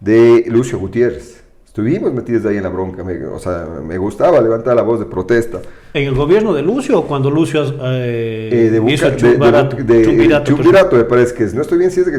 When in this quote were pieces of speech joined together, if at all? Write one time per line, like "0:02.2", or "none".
none